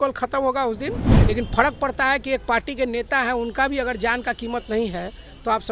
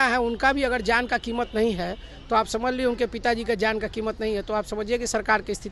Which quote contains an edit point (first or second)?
first